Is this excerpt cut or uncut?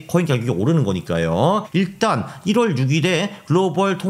cut